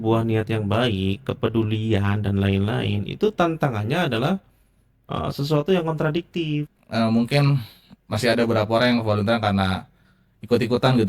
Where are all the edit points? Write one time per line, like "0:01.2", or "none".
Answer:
0:06.8